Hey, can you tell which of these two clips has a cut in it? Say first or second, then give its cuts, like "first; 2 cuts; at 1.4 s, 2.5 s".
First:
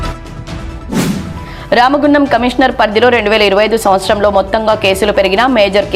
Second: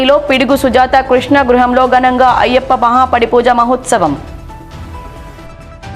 first; 1 cut; at 1.1 s